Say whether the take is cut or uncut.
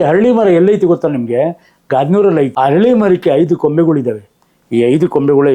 cut